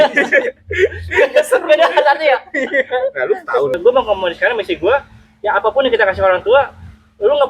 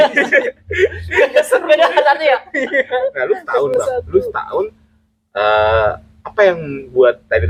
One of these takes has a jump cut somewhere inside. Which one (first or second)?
first